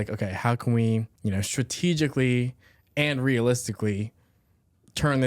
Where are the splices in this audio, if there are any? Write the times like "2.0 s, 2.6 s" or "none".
1.1 s